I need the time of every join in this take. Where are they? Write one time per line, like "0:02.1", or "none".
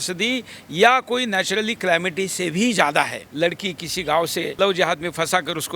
0:03.2
0:04.5